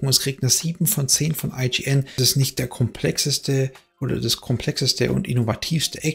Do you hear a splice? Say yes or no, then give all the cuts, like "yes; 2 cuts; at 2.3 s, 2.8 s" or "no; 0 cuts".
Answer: yes; 1 cut; at 2.2 s